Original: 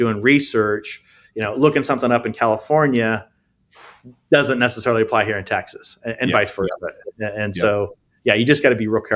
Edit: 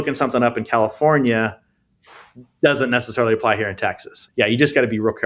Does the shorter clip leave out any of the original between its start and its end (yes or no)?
yes